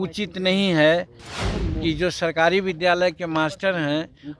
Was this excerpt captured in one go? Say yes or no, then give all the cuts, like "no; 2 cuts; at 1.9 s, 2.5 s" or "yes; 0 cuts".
no; 1 cut; at 1.4 s